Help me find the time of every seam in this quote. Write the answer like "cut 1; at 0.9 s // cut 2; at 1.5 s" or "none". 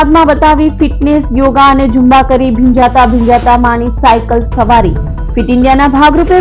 none